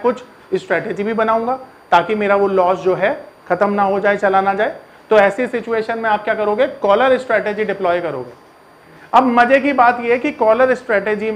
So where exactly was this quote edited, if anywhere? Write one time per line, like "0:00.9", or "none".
none